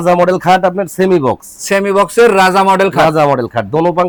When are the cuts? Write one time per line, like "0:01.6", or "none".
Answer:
none